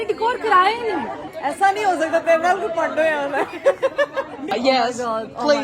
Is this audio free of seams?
no; 2 cuts; at 1.2 s, 4.5 s

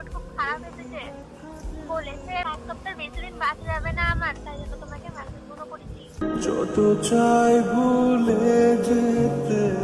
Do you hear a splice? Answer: yes; 1 cut; at 2.4 s

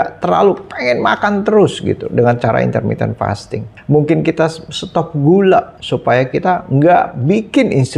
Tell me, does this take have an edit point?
no; 0 cuts

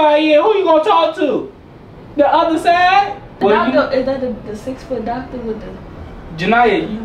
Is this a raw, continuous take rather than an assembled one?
no; 1 cut; at 3.4 s

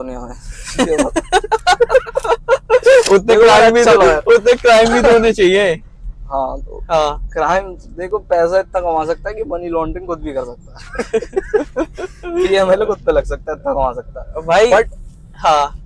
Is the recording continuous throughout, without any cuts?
yes; 0 cuts

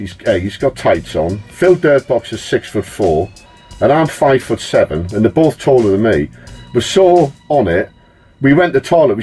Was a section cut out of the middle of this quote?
no; 0 cuts

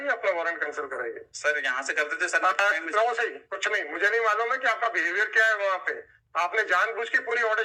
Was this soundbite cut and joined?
no; 0 cuts

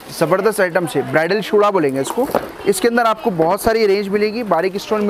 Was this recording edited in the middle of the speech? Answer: no; 0 cuts

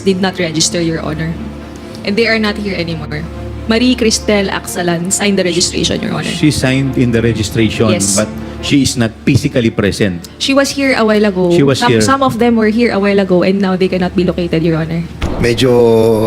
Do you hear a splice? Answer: yes; 1 cut; at 15.2 s

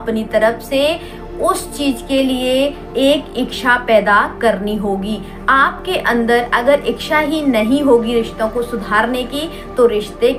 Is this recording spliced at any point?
no; 0 cuts

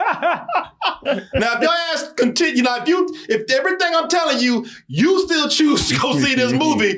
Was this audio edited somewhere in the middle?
yes; 1 cut; at 1.0 s

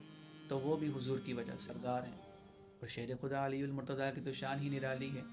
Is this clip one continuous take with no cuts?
no; 1 cut; at 1.7 s

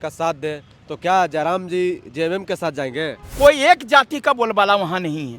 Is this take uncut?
no; 1 cut; at 3.2 s

